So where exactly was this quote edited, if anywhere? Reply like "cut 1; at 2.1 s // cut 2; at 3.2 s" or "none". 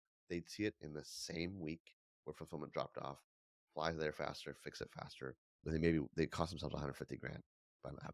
cut 1; at 5.6 s